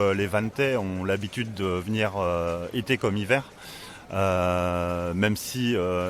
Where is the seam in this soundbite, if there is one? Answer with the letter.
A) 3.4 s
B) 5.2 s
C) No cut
C